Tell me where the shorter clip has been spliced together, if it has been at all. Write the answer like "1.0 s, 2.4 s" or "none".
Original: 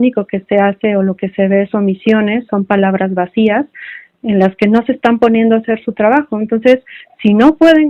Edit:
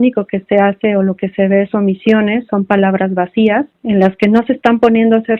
3.7 s